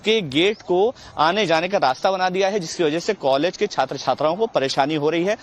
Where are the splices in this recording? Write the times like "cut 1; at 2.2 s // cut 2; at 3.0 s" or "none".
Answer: none